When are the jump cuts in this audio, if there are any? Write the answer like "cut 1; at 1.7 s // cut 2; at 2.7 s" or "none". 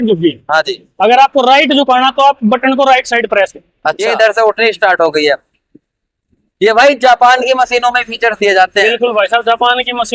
cut 1; at 4.0 s